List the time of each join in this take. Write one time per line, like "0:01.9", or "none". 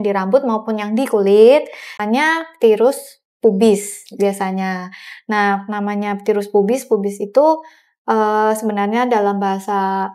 0:02.0